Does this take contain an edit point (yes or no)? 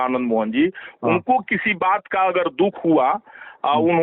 no